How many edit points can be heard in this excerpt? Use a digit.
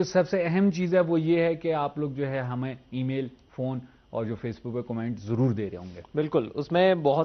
1